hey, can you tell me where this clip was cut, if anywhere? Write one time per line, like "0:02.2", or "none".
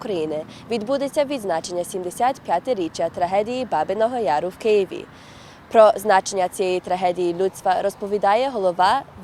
none